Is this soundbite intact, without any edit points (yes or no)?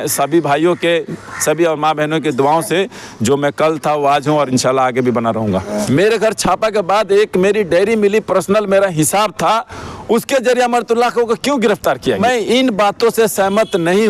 no